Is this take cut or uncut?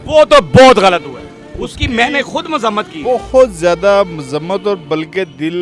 uncut